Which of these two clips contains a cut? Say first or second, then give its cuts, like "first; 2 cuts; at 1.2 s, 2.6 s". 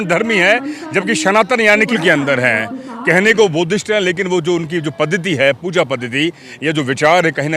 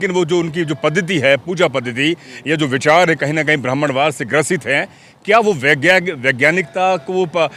first; 1 cut; at 2.0 s